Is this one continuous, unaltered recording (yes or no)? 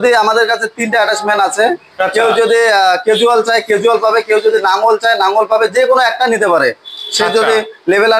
yes